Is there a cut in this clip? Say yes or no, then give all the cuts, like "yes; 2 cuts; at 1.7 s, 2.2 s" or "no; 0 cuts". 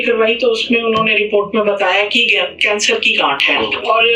no; 0 cuts